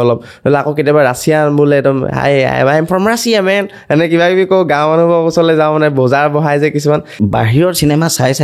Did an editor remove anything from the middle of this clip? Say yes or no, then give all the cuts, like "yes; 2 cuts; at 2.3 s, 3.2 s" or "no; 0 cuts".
yes; 1 cut; at 7.1 s